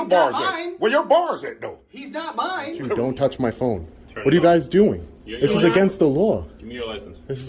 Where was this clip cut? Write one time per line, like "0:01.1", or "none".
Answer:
0:02.9